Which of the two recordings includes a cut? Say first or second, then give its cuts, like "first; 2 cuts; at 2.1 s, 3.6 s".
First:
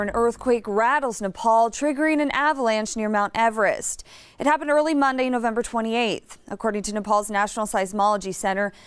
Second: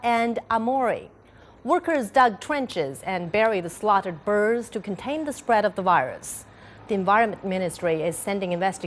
second; 1 cut; at 4.9 s